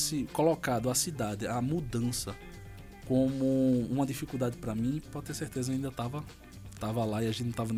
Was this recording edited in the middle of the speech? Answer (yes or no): no